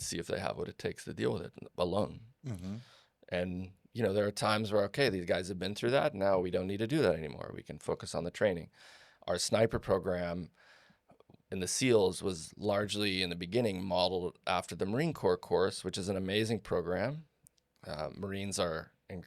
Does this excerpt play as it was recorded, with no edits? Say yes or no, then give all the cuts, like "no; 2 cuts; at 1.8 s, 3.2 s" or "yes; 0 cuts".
yes; 0 cuts